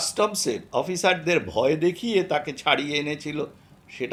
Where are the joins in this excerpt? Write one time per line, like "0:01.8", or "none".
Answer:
none